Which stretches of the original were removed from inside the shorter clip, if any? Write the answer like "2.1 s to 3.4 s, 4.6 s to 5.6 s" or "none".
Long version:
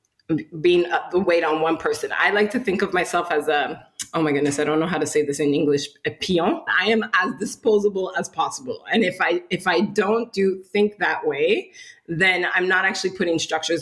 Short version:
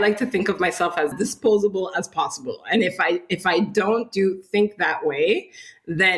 3.4 s to 7.3 s